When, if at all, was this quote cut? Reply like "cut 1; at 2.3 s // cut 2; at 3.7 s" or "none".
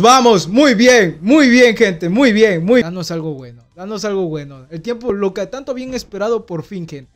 cut 1; at 2.9 s